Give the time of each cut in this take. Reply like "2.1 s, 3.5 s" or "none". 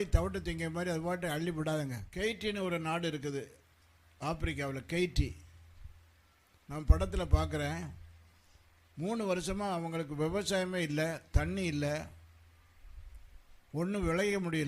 2.0 s